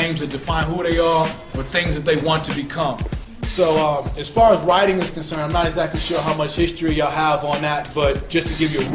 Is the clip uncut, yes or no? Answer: no